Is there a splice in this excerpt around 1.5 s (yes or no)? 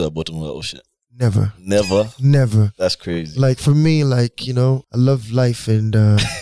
no